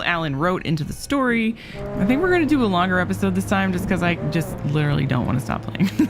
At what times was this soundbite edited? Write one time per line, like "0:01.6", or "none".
0:01.8